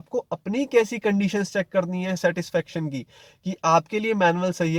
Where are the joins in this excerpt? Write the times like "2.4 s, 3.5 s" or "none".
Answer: none